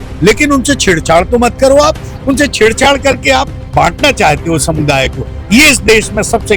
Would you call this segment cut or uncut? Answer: uncut